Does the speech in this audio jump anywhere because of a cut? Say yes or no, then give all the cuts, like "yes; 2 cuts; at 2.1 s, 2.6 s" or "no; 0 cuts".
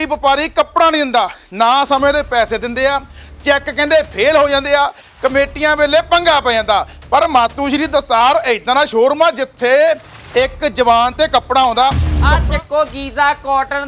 yes; 1 cut; at 12.1 s